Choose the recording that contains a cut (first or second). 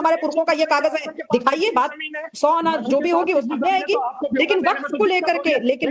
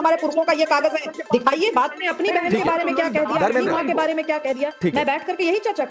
second